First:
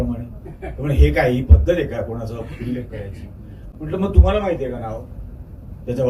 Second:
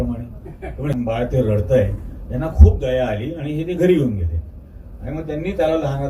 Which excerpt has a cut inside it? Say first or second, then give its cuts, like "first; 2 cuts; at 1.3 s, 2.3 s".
second; 1 cut; at 0.9 s